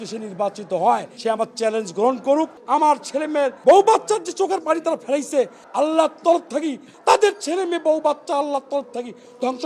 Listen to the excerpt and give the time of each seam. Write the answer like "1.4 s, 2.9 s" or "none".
1.1 s, 3.1 s, 5.6 s, 6.9 s